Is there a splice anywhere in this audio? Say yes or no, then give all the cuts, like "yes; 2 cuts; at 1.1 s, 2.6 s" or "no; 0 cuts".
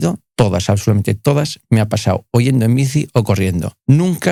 no; 0 cuts